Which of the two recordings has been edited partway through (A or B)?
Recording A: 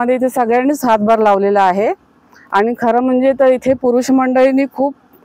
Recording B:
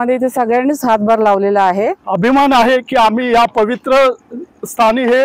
B